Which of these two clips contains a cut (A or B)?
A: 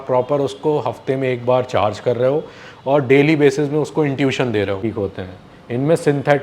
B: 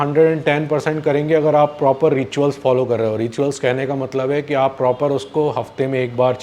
A